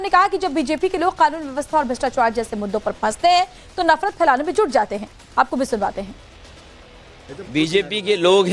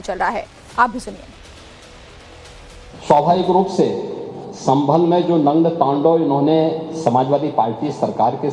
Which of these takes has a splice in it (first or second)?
first